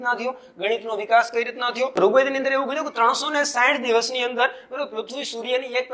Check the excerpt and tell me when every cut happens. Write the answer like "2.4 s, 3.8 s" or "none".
1.9 s